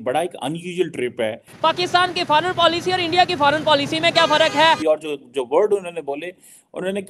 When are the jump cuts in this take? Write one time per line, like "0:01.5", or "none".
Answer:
0:01.5
0:04.8